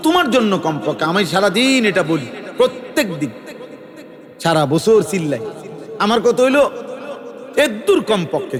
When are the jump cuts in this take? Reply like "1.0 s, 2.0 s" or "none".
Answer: none